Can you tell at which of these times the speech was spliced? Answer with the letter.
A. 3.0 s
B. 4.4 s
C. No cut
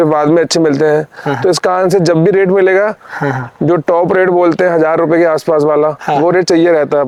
C